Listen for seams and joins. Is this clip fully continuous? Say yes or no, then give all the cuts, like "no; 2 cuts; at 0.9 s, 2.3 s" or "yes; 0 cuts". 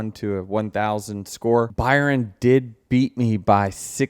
no; 1 cut; at 1.7 s